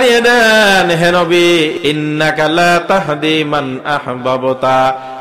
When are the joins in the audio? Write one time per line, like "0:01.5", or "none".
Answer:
0:01.7